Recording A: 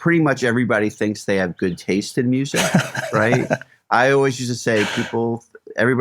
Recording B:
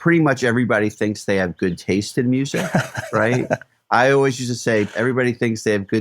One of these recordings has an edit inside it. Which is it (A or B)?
B